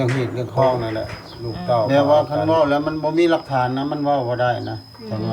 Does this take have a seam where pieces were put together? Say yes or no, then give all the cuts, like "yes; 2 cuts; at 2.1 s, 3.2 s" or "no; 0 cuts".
yes; 1 cut; at 1.9 s